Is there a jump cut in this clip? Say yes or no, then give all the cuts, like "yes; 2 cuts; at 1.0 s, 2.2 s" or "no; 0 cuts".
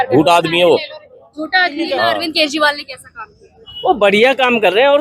yes; 1 cut; at 2.1 s